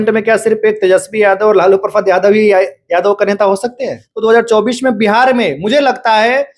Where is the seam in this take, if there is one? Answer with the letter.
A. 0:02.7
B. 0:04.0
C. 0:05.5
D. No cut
B